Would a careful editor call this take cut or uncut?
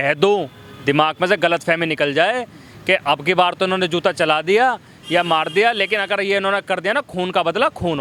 uncut